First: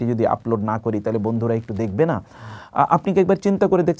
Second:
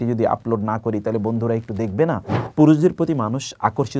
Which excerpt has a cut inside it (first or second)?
second